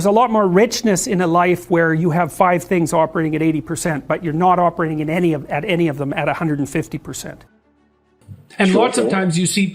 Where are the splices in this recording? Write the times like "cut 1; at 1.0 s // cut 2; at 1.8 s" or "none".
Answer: cut 1; at 8.1 s